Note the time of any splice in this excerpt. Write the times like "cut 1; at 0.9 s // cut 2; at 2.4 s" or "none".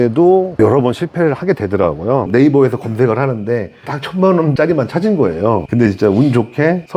cut 1; at 2.3 s